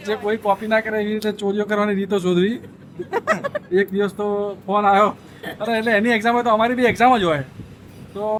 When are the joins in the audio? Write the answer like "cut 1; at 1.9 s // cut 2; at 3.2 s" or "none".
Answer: none